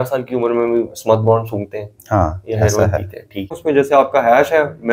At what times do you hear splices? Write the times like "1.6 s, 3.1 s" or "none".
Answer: 3.6 s